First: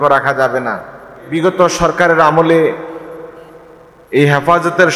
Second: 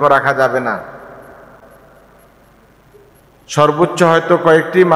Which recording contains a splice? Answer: first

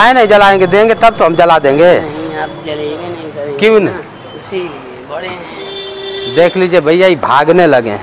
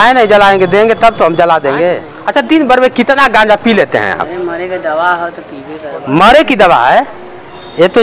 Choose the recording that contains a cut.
second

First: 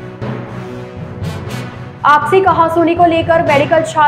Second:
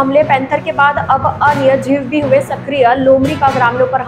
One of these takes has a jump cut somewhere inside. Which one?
first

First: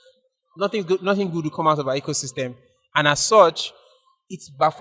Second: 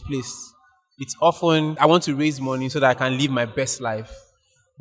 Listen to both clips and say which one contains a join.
second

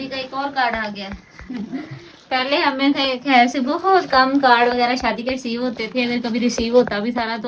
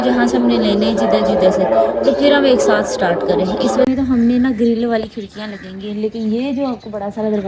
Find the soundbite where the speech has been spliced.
second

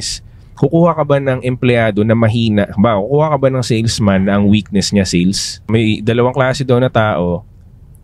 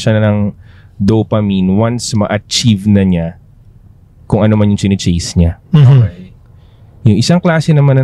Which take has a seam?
first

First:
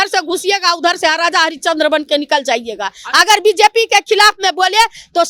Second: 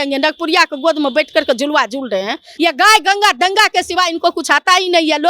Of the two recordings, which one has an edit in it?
second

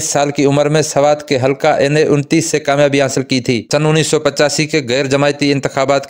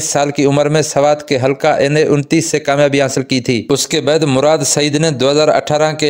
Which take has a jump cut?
first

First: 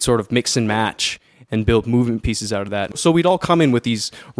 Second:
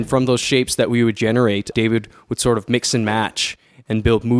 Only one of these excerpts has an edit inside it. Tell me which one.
first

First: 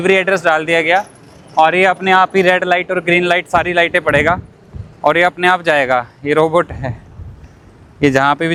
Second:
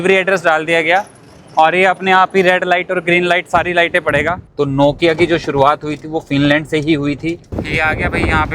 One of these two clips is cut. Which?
second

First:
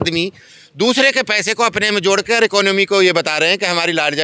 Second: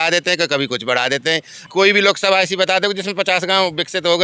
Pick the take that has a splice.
second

